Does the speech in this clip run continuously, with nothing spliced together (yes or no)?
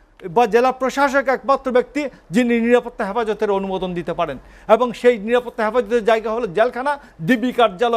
yes